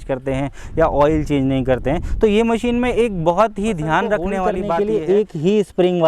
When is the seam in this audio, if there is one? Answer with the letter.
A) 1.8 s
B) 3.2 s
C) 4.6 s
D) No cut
C